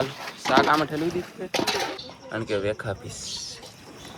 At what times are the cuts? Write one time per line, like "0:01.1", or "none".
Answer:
0:02.1